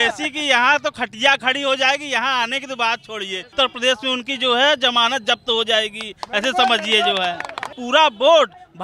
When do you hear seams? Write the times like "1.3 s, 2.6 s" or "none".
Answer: 3.5 s, 7.8 s